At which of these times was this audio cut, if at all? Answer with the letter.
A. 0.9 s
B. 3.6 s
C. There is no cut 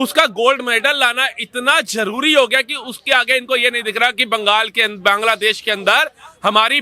C